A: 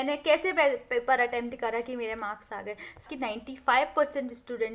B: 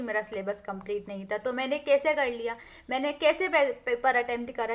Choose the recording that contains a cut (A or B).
A